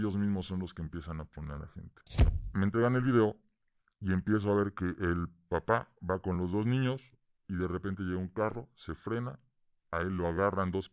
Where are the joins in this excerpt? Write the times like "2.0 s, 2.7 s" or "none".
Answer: 2.0 s